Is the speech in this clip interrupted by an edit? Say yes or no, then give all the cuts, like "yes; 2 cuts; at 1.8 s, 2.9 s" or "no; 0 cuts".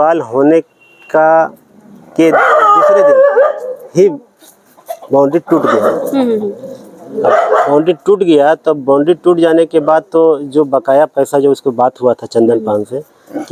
no; 0 cuts